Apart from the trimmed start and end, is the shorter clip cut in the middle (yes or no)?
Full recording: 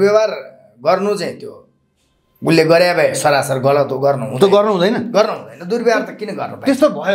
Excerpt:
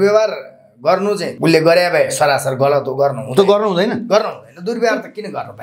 yes